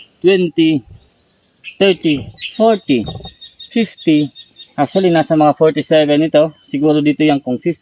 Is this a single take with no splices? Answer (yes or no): yes